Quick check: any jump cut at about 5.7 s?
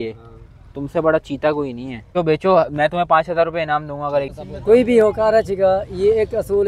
no; 2 cuts; at 2.1 s, 4.4 s

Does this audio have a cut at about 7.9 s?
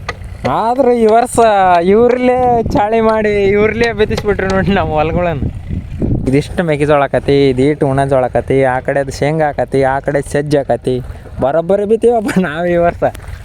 no; 1 cut; at 6.2 s

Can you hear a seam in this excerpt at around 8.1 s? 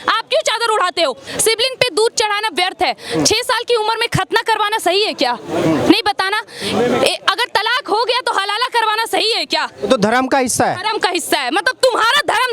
no; 1 cut; at 1.2 s

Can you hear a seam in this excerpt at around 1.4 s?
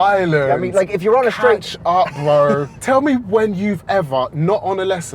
no; 1 cut; at 2.7 s

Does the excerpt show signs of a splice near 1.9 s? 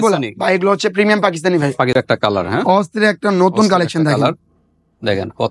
yes; 1 cut; at 1.9 s

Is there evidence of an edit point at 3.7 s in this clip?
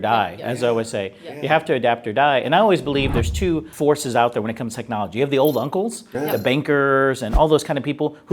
yes; 1 cut; at 3.7 s

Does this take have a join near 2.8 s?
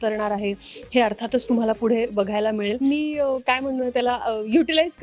yes; 1 cut; at 2.8 s

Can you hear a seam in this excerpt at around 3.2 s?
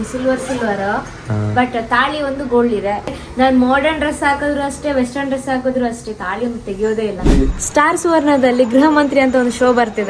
yes; 2 cuts; at 3.2 s, 7.3 s

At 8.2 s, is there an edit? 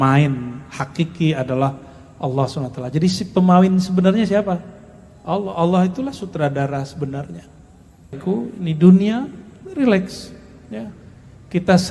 yes; 1 cut; at 8.2 s

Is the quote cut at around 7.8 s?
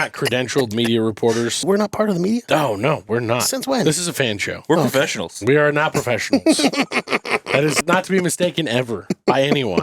yes; 2 cuts; at 1.6 s, 7.8 s

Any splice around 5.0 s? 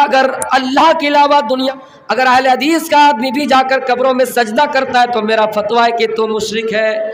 no; 1 cut; at 1.7 s

